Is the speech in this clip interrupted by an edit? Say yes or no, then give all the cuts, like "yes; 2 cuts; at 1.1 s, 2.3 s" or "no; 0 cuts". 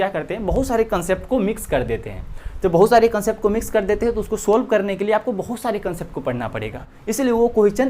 yes; 1 cut; at 6.9 s